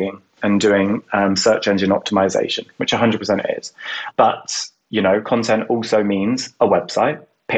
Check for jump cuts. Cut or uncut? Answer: cut